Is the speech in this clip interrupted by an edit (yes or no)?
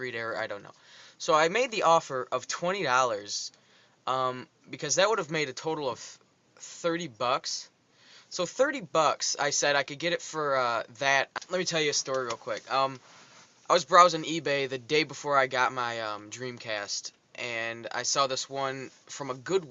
no